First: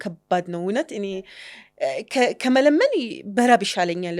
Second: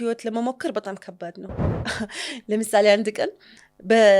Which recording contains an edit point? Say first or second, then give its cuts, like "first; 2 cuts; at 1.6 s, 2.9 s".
second; 1 cut; at 1.6 s